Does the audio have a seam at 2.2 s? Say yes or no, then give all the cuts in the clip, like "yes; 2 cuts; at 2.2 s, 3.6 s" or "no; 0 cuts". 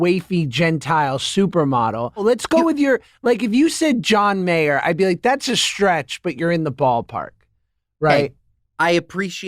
yes; 1 cut; at 2.2 s